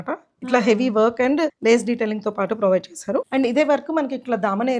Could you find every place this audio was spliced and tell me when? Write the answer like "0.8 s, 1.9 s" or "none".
1.6 s, 3.3 s

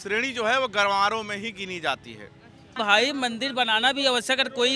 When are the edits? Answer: 2.7 s

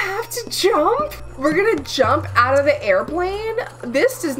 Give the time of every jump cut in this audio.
1.2 s

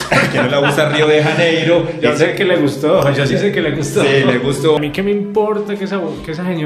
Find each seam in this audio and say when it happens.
4.8 s

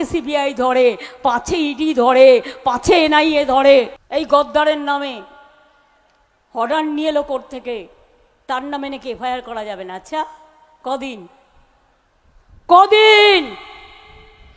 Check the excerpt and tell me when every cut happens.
4.0 s

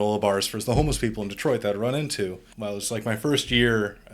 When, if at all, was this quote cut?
2.5 s

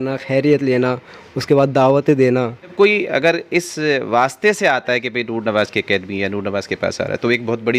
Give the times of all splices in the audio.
2.7 s

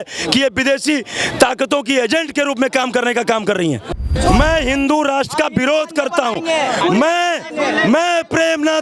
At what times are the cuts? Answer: 4.0 s

